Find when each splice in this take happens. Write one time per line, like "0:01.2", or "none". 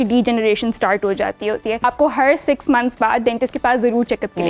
0:01.8

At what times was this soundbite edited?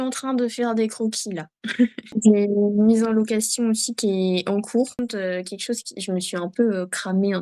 0:02.1
0:05.0

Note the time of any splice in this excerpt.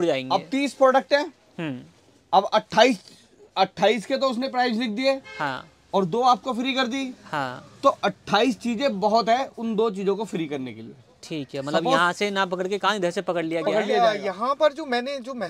0:14.0

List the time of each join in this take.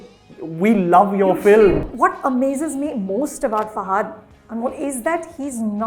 0:01.9

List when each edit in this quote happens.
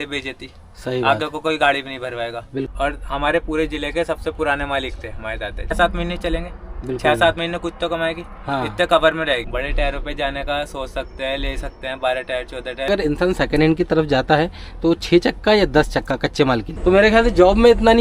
0:02.7
0:05.8
0:09.5
0:12.9
0:16.7

